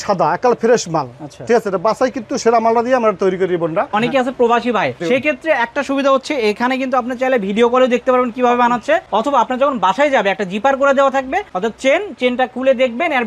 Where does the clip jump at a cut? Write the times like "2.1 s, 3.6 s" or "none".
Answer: 3.9 s, 5.0 s, 9.1 s, 11.5 s